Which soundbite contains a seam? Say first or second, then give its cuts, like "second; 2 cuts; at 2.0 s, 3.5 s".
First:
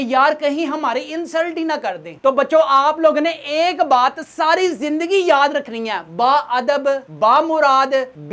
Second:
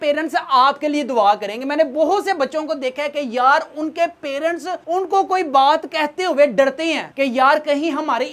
first; 1 cut; at 2.1 s